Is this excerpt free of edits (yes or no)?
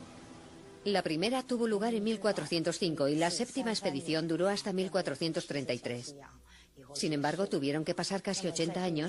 yes